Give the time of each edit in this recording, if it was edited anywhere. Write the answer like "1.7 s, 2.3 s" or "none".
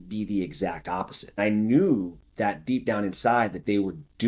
1.4 s